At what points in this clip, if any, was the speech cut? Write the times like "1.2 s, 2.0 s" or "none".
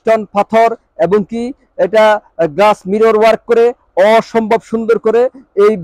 none

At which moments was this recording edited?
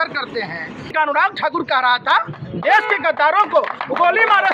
0.9 s

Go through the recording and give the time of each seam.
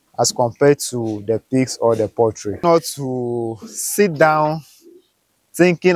2.6 s

